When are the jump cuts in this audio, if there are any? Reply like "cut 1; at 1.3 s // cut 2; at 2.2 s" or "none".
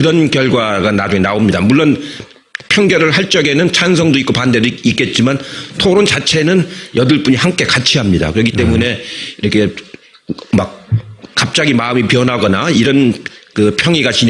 cut 1; at 2.4 s